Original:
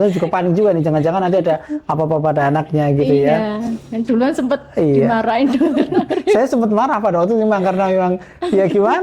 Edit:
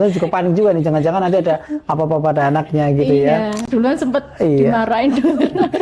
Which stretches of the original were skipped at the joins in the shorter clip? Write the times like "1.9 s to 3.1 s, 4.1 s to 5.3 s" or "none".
3.6 s to 4.0 s